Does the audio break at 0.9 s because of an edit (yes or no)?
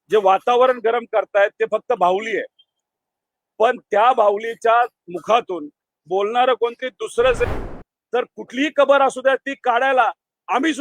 no